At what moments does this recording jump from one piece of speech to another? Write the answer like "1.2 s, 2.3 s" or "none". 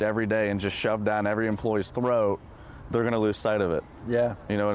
none